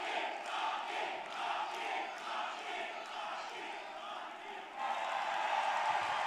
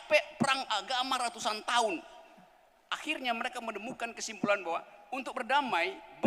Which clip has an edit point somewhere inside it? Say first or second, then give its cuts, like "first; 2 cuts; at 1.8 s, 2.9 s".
first; 1 cut; at 4.8 s